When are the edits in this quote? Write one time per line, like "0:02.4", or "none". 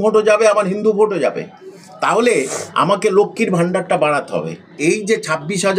0:04.7